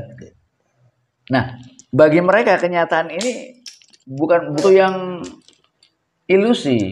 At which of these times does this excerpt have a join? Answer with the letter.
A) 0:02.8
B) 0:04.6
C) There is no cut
B